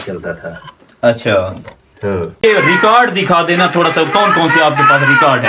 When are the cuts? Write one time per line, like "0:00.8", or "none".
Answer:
0:02.4